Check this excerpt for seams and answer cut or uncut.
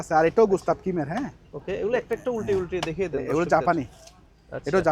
uncut